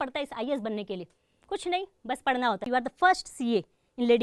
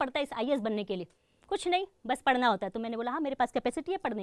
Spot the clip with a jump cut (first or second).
first